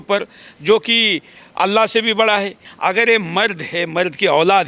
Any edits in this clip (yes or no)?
yes